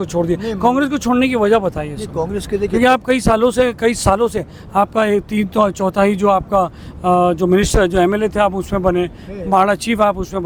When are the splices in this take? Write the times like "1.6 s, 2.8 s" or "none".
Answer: none